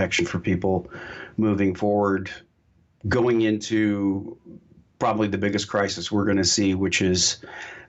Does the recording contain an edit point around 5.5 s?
yes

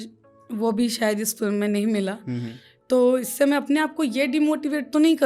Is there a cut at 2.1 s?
no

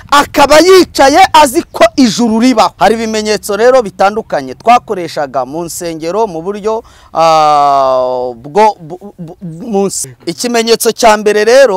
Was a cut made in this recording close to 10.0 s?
yes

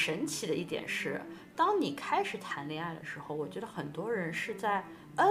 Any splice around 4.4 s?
no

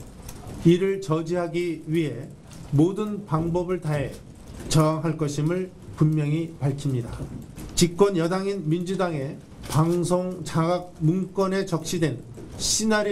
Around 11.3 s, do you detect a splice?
yes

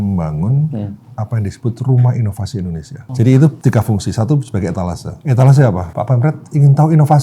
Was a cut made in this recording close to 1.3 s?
no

